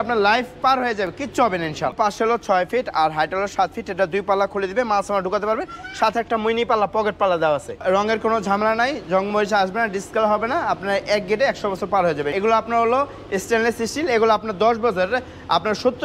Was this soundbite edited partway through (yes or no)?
yes